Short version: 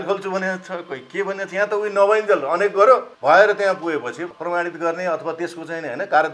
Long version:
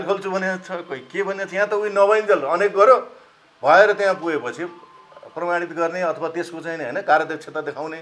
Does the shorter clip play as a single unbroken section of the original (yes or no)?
no